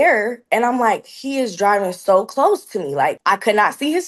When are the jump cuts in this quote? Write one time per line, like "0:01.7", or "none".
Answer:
0:03.2